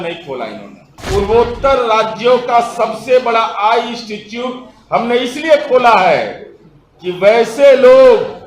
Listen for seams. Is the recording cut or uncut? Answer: cut